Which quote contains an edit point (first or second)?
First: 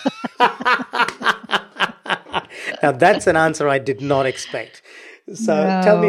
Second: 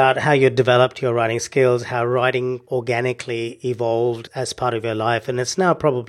second